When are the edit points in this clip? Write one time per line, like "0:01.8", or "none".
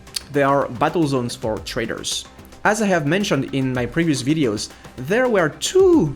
none